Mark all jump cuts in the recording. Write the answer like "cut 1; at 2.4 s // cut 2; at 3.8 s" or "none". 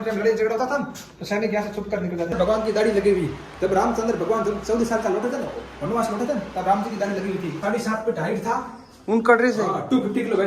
cut 1; at 2.4 s // cut 2; at 7.6 s